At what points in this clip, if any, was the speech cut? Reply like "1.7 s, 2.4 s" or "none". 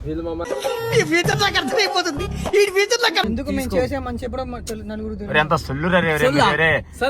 3.2 s